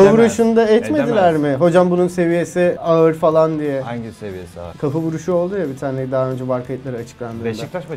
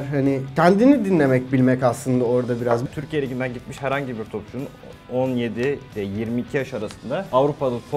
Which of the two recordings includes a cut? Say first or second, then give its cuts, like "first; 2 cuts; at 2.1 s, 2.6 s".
second; 1 cut; at 2.8 s